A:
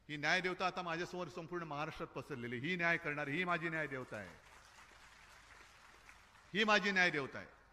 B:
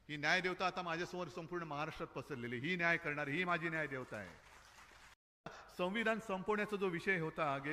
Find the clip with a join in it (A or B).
B